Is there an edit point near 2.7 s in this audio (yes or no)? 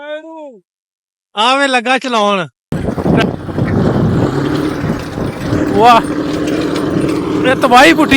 yes